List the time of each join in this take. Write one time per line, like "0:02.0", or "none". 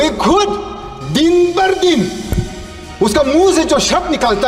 none